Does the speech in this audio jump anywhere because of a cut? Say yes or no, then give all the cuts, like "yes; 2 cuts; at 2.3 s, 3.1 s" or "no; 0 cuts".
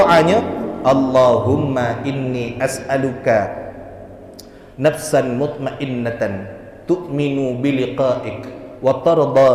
no; 0 cuts